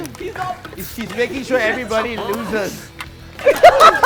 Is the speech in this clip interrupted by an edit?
yes; 1 cut; at 3.1 s

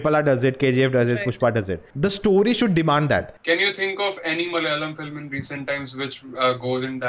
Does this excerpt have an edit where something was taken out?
yes; 2 cuts; at 1.8 s, 3.3 s

